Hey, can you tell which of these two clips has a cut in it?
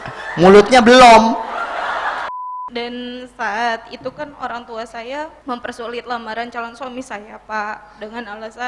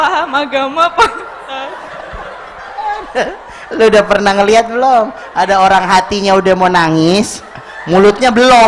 first; 2 cuts; at 2.3 s, 5.4 s

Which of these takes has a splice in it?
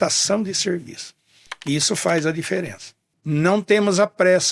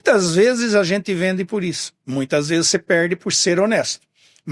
first; 1 cut; at 3.1 s

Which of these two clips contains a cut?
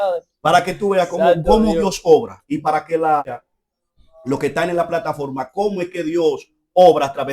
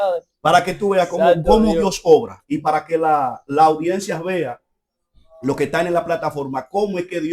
first; 1 cut; at 3.3 s

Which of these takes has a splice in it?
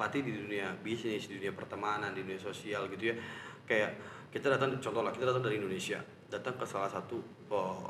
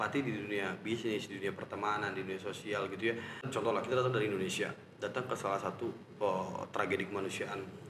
second; 1 cut; at 3.5 s

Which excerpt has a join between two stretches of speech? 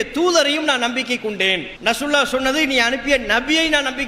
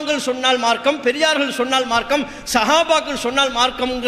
first; 1 cut; at 1.7 s

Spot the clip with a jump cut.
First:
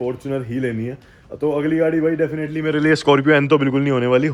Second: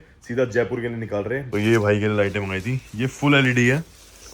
second; 1 cut; at 1.4 s

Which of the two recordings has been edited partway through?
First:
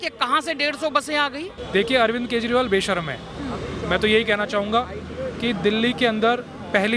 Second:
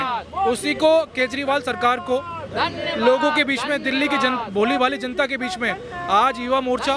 first; 1 cut; at 1.6 s

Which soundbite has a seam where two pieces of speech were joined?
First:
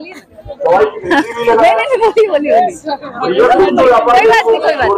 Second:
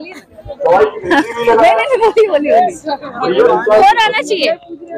second; 1 cut; at 3.4 s

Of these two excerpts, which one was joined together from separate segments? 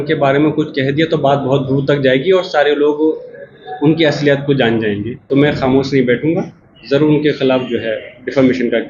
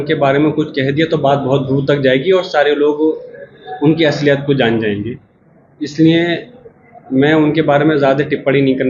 first; 1 cut; at 5.1 s

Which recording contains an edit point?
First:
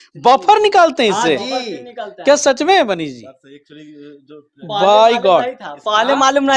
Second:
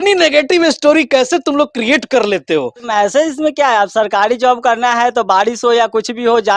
second; 1 cut; at 2.8 s

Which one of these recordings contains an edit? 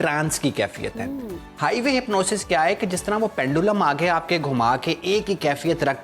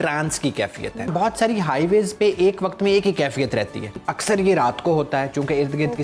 second; 2 cuts; at 1.1 s, 4.0 s

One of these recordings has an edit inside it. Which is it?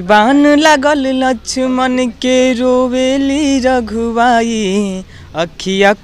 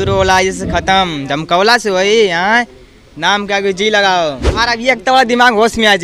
second; 1 cut; at 4.5 s

